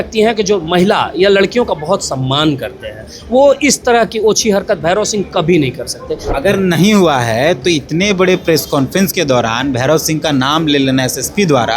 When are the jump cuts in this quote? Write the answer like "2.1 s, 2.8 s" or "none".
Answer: 6.3 s

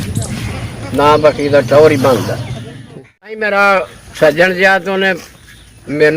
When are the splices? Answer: 3.4 s

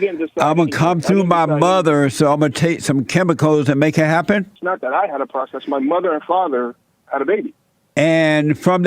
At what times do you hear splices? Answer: 4.6 s

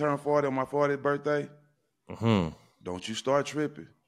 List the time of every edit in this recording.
none

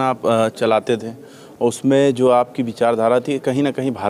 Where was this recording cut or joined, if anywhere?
none

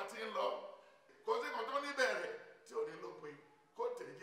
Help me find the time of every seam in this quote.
1.1 s

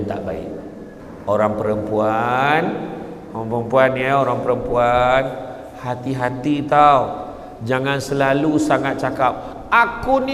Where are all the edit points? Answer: none

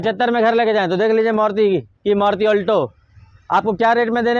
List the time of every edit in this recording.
none

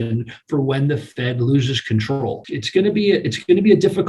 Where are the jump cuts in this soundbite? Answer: 2.4 s

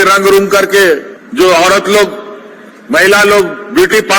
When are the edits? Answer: 1.2 s

